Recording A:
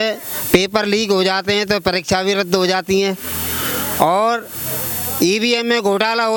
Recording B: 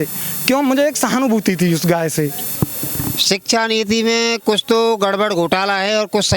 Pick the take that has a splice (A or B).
B